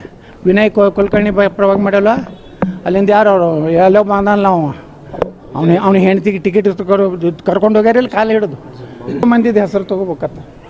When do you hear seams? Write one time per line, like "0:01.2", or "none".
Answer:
0:09.2